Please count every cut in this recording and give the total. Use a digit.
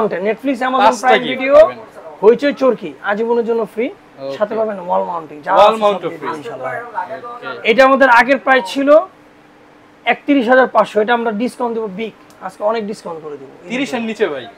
0